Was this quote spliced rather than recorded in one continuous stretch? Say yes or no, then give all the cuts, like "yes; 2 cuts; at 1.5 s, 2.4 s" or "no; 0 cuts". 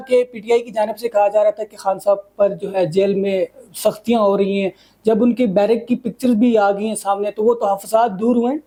no; 0 cuts